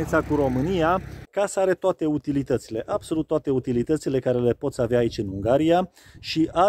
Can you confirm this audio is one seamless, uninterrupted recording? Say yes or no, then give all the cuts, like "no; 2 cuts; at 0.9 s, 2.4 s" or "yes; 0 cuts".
no; 1 cut; at 1.2 s